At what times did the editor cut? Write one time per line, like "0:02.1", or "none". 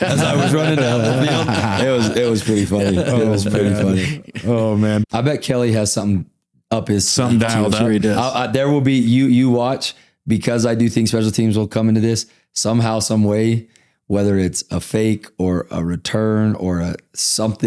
0:05.0